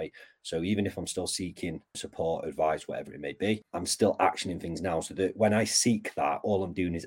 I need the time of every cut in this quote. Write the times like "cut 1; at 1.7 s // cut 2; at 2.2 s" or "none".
cut 1; at 2.0 s // cut 2; at 3.7 s